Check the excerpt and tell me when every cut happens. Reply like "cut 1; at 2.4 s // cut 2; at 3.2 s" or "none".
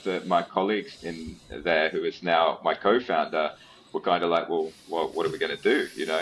none